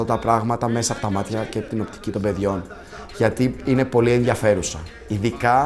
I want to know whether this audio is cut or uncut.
uncut